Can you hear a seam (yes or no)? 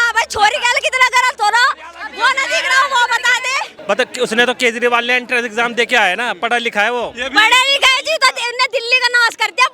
yes